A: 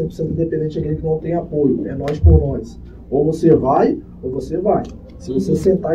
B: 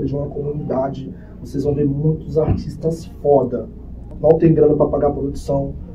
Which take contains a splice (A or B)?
B